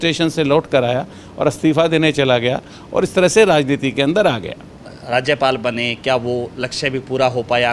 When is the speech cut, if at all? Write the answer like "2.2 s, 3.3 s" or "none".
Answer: 4.9 s